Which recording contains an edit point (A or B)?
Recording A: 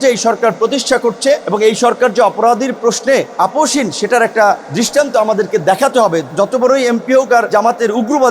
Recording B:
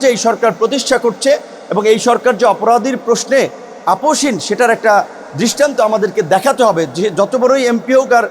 A